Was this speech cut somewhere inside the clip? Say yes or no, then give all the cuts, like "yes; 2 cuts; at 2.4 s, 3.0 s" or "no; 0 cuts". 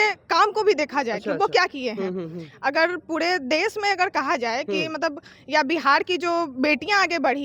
no; 0 cuts